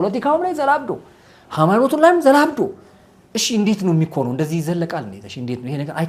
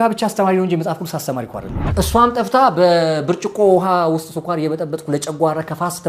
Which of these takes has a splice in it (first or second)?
second